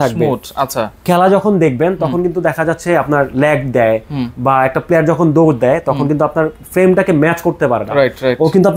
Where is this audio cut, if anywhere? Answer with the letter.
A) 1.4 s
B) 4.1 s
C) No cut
C